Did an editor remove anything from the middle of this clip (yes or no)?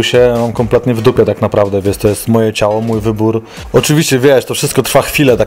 yes